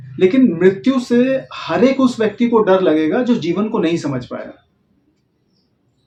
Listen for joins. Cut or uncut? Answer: uncut